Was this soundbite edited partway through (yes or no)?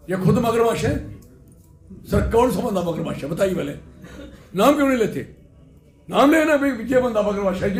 no